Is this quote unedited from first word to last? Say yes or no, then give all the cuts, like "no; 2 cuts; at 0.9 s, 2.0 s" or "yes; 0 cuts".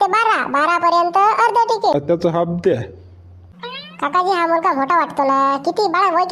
no; 1 cut; at 1.9 s